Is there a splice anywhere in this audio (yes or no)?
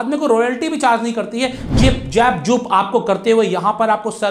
yes